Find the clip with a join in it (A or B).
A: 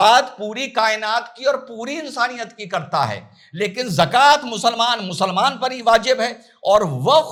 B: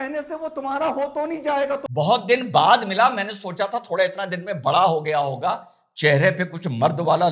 B